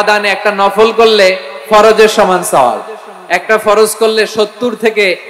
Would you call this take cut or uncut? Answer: uncut